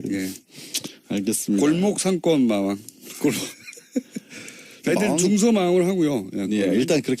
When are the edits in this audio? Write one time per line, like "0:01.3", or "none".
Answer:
0:01.3

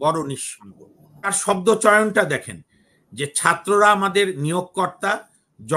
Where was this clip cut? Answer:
0:01.4

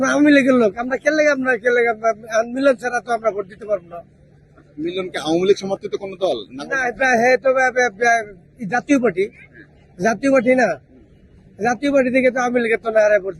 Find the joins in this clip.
none

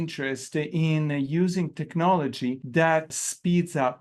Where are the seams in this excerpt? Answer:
0:03.0

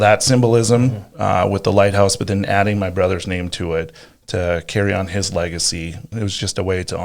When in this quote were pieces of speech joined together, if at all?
0:06.1

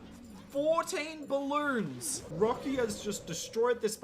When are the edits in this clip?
0:02.2

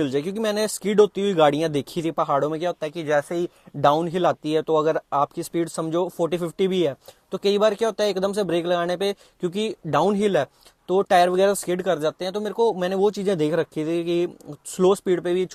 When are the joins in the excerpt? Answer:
none

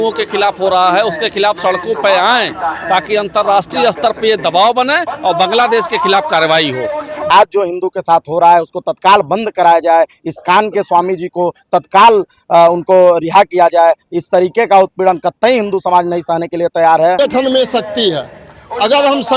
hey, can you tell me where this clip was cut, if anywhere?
0:07.3
0:17.2

